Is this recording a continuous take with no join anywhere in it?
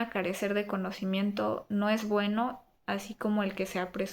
yes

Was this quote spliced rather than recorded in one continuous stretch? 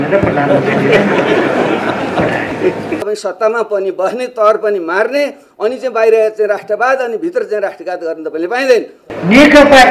yes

